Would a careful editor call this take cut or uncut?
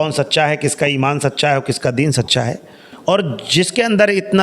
cut